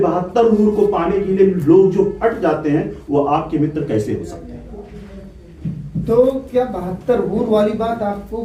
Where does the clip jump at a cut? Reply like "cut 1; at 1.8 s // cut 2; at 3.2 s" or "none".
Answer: none